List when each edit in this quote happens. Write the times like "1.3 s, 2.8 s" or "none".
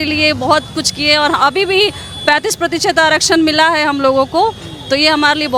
none